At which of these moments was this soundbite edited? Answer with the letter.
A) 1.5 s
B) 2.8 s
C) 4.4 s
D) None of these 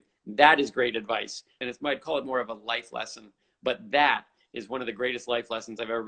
A